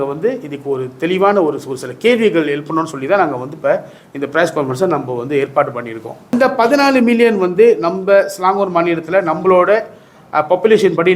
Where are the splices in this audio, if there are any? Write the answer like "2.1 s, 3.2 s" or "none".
6.3 s